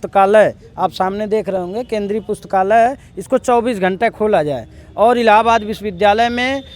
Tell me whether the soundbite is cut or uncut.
uncut